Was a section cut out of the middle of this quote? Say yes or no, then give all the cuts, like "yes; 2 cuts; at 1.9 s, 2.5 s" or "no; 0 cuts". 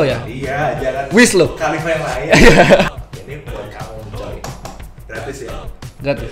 yes; 1 cut; at 2.9 s